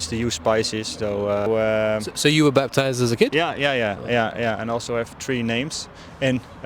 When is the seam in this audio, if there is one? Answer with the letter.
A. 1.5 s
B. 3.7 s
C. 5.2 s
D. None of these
A